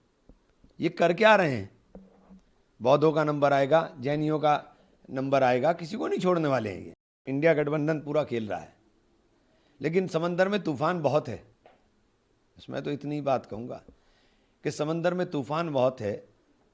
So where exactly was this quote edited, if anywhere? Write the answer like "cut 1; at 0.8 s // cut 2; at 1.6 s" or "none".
cut 1; at 7.2 s